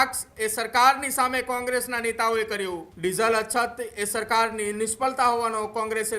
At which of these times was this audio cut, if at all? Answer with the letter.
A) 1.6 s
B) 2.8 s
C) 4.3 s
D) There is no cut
B